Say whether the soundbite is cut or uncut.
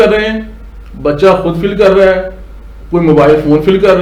uncut